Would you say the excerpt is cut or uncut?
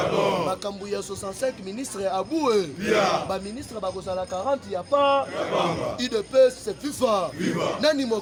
uncut